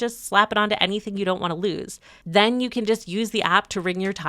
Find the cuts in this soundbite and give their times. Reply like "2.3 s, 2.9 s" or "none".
none